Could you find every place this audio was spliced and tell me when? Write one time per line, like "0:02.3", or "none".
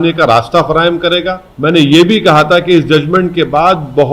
0:01.4